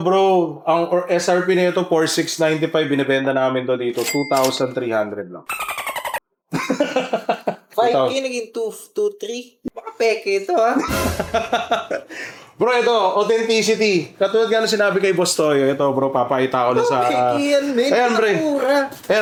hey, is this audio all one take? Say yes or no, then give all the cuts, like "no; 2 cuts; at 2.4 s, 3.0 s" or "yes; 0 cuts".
yes; 0 cuts